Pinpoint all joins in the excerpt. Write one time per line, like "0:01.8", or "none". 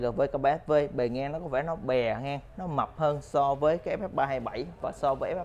none